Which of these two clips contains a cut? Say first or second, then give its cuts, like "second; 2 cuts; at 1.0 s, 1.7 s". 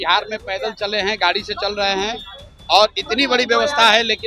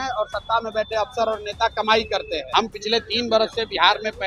second; 1 cut; at 2.4 s